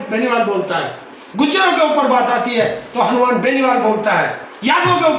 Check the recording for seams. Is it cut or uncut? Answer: uncut